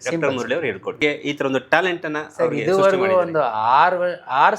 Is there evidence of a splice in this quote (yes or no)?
yes